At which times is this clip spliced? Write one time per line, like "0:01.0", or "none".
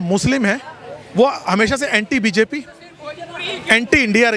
none